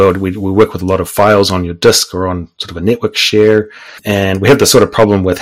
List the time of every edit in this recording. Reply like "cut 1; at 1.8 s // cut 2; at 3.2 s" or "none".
cut 1; at 4.0 s

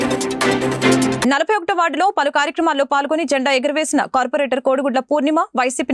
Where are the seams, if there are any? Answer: none

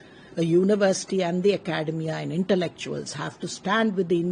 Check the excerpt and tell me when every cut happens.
none

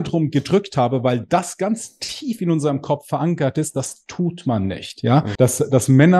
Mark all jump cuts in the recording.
cut 1; at 5.3 s

